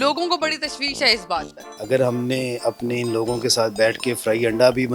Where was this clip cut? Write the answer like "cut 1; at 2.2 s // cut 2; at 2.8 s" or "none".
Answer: cut 1; at 1.5 s